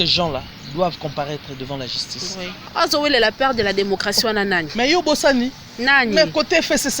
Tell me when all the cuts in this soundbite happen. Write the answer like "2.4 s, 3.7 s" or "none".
2.6 s